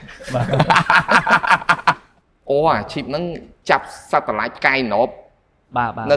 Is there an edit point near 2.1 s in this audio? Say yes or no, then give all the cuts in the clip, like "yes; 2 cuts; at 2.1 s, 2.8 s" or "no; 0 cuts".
yes; 1 cut; at 2.1 s